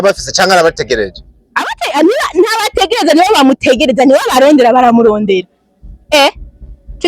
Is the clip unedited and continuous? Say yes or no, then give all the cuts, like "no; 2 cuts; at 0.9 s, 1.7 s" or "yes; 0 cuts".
yes; 0 cuts